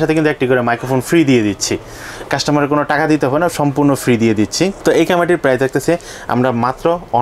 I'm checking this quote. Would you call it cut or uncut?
uncut